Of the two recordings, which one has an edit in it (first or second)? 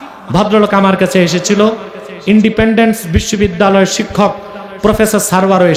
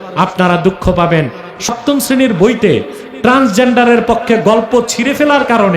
second